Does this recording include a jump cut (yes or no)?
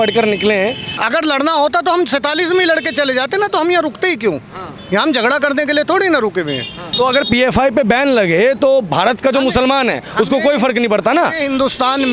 yes